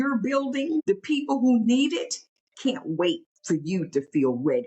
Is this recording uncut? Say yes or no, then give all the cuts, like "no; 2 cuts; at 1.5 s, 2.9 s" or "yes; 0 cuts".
no; 2 cuts; at 0.8 s, 3.3 s